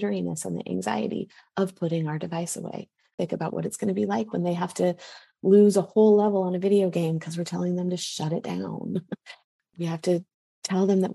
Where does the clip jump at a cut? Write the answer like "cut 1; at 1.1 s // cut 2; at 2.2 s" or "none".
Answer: cut 1; at 3.1 s